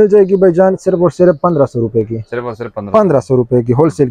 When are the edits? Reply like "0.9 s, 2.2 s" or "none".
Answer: none